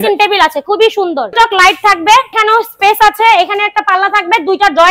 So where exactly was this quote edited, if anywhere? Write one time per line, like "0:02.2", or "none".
0:01.3
0:02.4